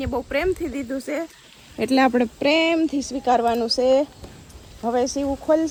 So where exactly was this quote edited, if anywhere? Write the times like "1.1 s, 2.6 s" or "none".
none